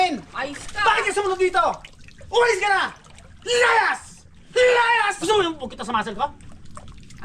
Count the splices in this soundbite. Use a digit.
1